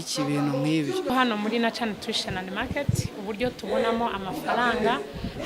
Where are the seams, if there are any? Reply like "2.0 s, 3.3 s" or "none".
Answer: 1.1 s